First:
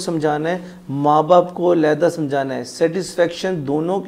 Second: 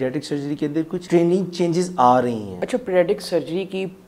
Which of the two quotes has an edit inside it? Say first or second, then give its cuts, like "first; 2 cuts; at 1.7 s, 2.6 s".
second; 2 cuts; at 1.0 s, 2.5 s